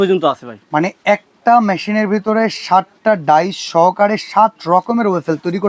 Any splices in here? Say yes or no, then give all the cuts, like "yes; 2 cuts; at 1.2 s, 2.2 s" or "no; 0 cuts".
no; 0 cuts